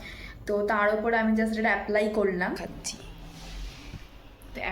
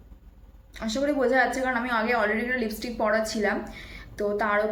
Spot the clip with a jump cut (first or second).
first